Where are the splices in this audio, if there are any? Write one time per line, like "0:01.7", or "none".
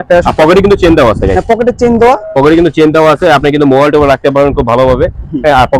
none